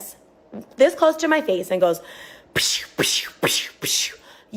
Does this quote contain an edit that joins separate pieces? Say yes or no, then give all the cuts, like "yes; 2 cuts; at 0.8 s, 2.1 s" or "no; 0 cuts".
no; 0 cuts